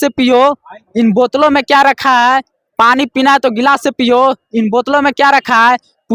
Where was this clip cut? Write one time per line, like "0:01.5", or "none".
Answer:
none